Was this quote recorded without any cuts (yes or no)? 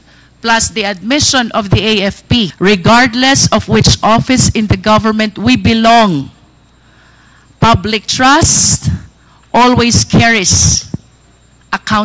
no